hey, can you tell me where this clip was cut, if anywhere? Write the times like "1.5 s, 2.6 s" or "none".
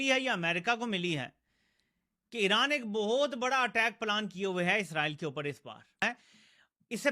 6.0 s